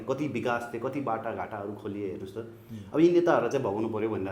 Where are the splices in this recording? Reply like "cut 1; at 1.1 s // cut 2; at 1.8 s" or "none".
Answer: none